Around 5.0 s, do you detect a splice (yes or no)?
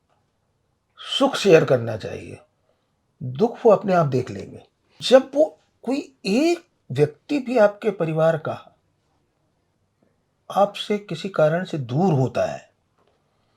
yes